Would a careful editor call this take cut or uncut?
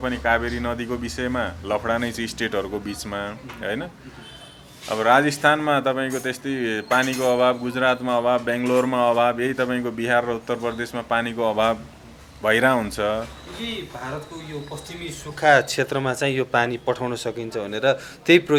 uncut